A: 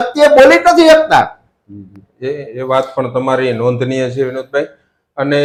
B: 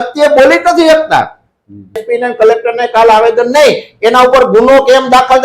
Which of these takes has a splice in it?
B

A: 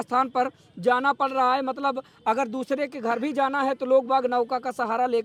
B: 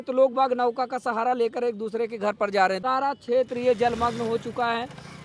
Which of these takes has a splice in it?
B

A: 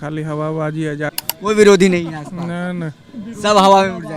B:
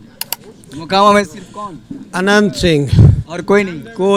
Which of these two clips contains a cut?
A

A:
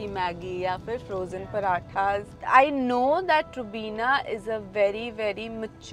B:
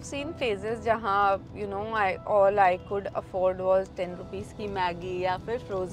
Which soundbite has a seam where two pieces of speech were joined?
A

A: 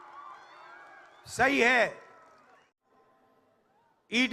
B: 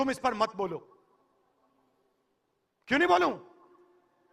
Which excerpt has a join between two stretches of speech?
A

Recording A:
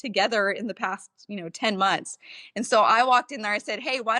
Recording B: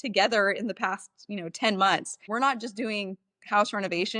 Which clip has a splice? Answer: B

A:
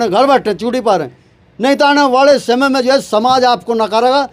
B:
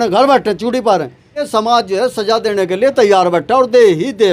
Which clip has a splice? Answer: B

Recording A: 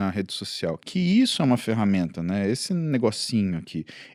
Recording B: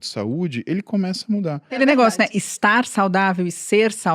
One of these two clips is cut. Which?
B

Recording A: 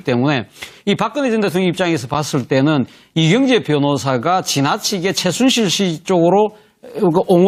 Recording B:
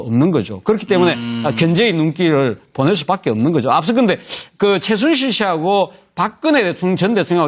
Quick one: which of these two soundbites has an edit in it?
B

